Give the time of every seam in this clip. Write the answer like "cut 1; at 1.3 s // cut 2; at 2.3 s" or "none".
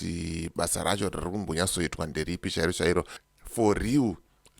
cut 1; at 3.2 s

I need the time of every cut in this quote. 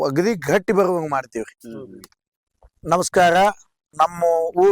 cut 1; at 2.7 s // cut 2; at 3.8 s

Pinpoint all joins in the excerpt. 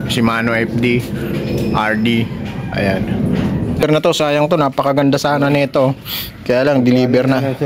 cut 1; at 3.8 s

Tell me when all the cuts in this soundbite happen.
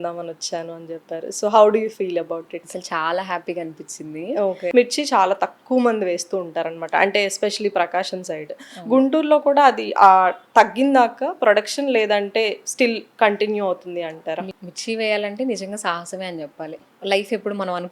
cut 1; at 4.7 s // cut 2; at 14.5 s // cut 3; at 16.8 s

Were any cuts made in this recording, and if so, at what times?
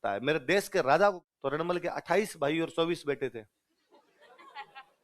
cut 1; at 1.2 s

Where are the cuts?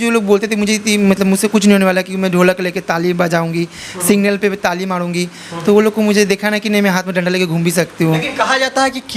none

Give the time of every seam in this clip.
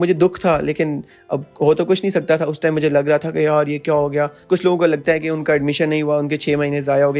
cut 1; at 4.4 s

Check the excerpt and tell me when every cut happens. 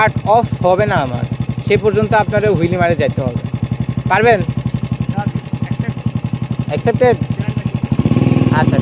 none

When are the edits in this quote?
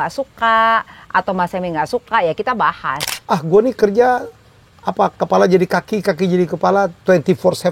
cut 1; at 3.1 s

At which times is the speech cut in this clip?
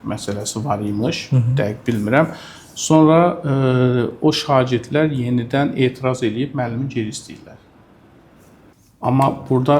cut 1; at 8.7 s

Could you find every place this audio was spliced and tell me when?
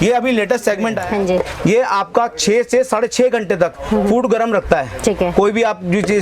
cut 1; at 1.0 s

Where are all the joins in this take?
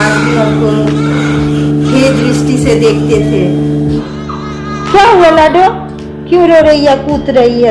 cut 1; at 4.0 s

